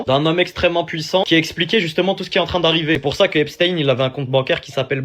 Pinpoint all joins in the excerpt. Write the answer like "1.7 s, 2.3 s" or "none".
3.0 s